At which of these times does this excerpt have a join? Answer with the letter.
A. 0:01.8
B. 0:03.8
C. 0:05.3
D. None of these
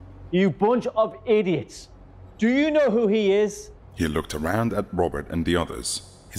D